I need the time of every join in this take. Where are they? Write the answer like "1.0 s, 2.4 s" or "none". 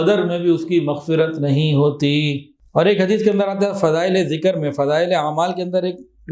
2.5 s